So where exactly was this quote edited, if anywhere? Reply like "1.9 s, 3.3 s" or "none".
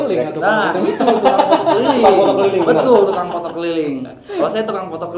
none